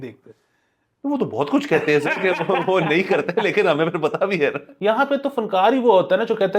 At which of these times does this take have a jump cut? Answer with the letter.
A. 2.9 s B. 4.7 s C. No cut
B